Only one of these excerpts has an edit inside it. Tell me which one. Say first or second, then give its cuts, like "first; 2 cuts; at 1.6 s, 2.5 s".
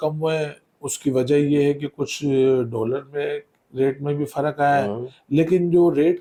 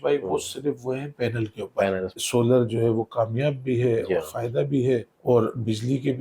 second; 2 cuts; at 2.2 s, 5.1 s